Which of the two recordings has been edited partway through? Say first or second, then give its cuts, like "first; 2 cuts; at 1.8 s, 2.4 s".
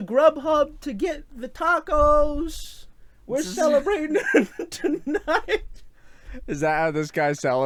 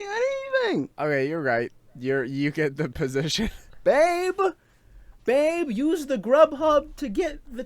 second; 2 cuts; at 0.9 s, 3.7 s